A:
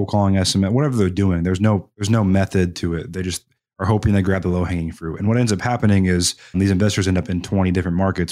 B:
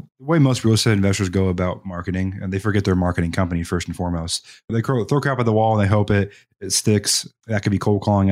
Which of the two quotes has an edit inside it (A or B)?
A